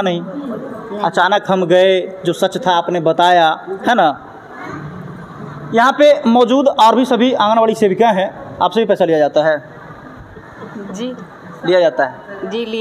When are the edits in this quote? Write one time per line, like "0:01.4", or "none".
none